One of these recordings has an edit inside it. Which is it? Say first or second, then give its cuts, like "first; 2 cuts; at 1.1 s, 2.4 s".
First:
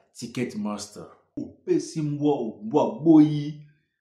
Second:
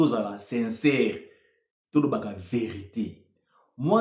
first; 1 cut; at 1.4 s